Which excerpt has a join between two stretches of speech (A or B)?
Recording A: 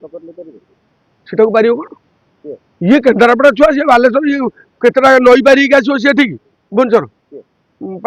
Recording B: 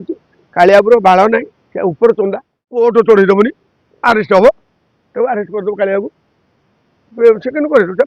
B